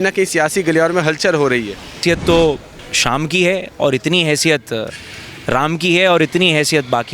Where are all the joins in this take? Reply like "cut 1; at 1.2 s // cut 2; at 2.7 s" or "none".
cut 1; at 2.0 s